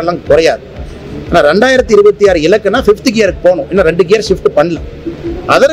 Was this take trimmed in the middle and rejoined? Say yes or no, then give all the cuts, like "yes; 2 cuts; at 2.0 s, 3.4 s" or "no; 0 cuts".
no; 0 cuts